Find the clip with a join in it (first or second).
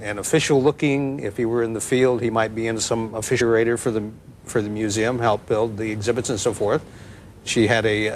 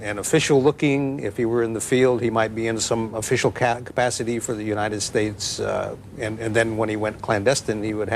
second